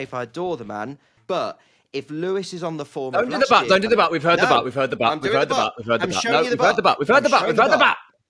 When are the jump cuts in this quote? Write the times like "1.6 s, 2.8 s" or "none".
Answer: 1.1 s